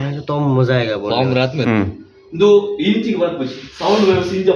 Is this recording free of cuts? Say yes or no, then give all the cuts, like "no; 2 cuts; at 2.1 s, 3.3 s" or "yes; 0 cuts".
no; 1 cut; at 1.6 s